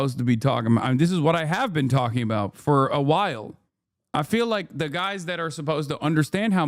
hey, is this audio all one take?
yes; 0 cuts

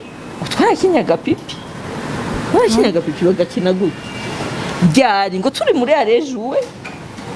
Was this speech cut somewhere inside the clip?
no; 0 cuts

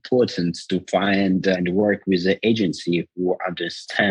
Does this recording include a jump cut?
yes; 1 cut; at 1.6 s

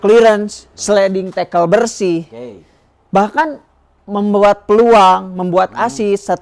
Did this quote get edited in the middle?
no; 0 cuts

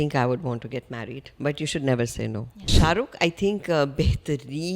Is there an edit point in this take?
yes; 1 cut; at 2.7 s

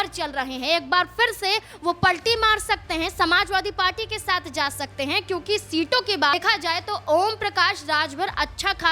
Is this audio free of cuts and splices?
no; 1 cut; at 6.3 s

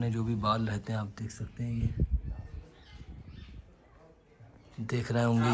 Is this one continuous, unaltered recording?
yes; 0 cuts

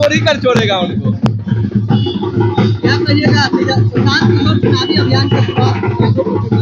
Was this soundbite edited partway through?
no; 0 cuts

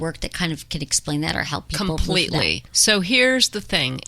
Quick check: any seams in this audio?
yes; 1 cut; at 2.7 s

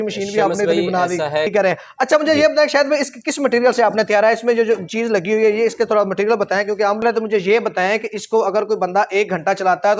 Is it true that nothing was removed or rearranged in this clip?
no; 2 cuts; at 1.5 s, 7.0 s

